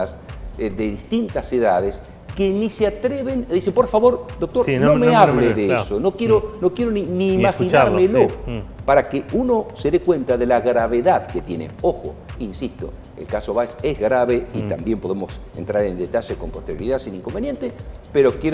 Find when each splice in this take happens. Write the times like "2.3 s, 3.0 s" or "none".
none